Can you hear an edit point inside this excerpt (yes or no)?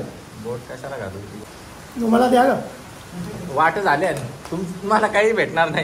yes